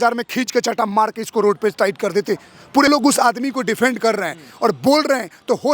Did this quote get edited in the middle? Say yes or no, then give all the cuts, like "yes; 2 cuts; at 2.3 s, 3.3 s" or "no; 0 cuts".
yes; 1 cut; at 2.9 s